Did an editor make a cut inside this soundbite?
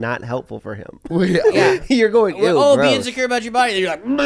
no; 0 cuts

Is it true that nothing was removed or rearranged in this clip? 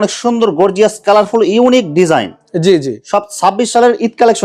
yes; 0 cuts

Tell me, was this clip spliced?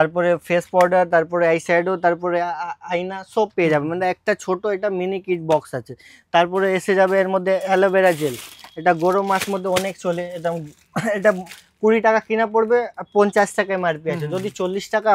no; 0 cuts

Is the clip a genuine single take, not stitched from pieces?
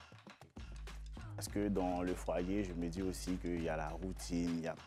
yes; 0 cuts

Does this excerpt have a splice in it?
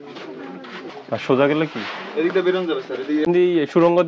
yes; 2 cuts; at 0.9 s, 3.3 s

